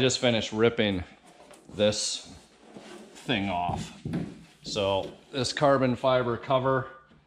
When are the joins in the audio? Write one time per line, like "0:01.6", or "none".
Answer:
none